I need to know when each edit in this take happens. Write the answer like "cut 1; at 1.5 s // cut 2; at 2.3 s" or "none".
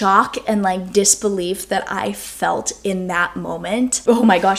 none